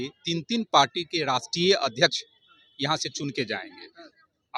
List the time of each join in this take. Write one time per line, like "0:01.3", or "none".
none